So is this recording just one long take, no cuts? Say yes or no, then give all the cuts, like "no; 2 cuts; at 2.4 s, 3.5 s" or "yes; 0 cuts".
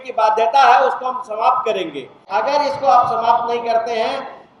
no; 1 cut; at 2.2 s